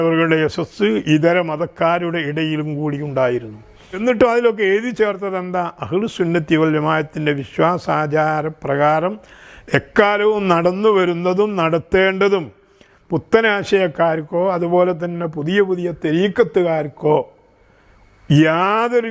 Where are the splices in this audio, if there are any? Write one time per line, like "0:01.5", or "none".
0:04.0